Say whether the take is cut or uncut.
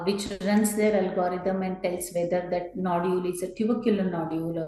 uncut